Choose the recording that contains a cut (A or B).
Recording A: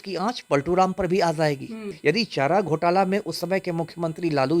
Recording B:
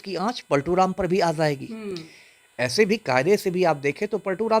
A